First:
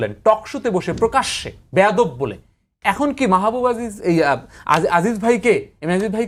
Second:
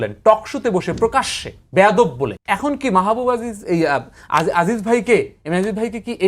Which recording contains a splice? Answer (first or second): second